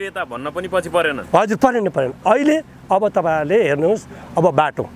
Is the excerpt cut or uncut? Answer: uncut